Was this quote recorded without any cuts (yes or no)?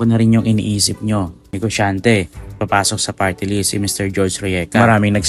no